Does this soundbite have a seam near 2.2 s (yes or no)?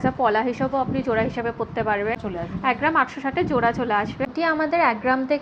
yes